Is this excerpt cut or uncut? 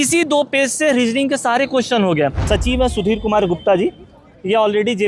cut